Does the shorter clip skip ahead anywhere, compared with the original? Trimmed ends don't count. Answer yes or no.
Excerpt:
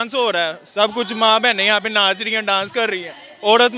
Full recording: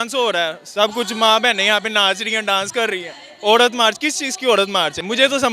no